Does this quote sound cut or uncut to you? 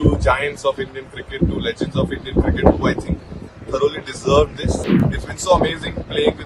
cut